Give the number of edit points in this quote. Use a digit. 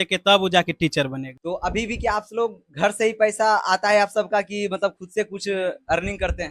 1